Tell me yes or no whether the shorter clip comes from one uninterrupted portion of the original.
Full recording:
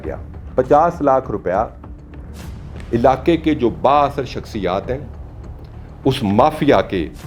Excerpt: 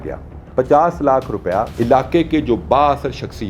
no